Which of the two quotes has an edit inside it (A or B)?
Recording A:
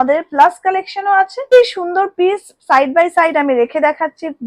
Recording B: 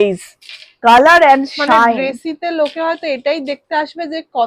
A